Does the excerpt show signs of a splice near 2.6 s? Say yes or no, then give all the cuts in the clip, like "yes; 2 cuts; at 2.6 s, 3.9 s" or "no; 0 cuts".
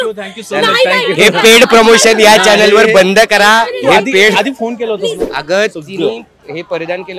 no; 1 cut; at 5.2 s